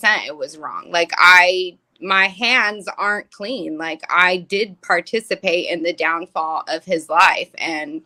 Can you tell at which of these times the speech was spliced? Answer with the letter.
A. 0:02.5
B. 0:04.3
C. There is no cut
C